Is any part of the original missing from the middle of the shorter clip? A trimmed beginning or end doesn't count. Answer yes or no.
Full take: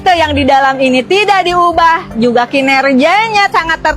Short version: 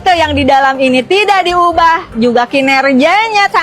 no